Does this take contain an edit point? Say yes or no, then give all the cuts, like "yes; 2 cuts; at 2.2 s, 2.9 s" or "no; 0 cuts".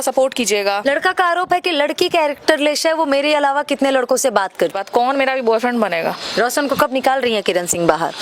yes; 3 cuts; at 0.8 s, 4.7 s, 6.2 s